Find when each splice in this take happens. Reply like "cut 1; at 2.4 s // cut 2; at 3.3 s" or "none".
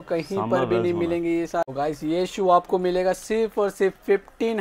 cut 1; at 1.6 s